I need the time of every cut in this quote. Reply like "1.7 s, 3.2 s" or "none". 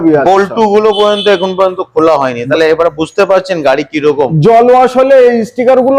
none